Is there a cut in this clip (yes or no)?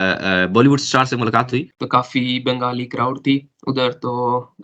yes